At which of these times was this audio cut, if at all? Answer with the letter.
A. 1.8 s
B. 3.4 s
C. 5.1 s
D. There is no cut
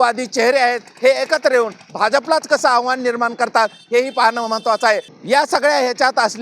C